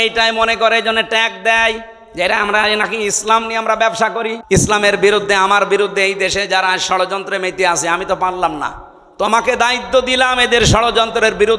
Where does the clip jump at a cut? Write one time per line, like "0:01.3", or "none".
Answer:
0:04.3